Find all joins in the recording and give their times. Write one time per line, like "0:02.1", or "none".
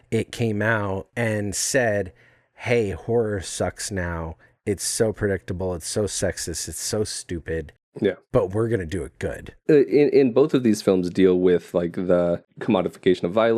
0:01.1
0:08.2
0:09.5
0:12.5